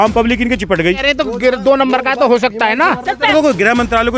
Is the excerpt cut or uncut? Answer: cut